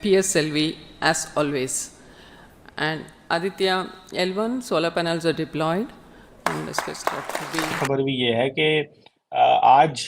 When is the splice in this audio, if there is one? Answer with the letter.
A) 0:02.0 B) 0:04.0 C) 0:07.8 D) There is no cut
C